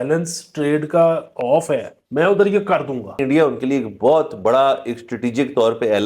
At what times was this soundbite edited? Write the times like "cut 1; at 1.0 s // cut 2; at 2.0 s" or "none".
cut 1; at 2.0 s // cut 2; at 3.2 s